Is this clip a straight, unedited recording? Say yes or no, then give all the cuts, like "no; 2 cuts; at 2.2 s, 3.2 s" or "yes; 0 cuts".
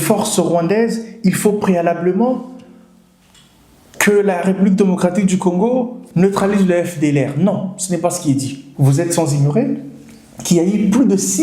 no; 1 cut; at 8.6 s